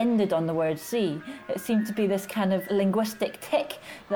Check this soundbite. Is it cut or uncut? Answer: uncut